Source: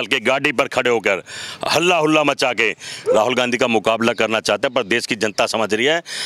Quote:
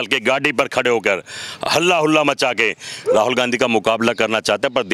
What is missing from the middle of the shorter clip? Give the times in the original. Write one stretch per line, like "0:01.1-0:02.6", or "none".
none